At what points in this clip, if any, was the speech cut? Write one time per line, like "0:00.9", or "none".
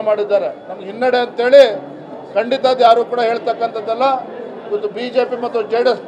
none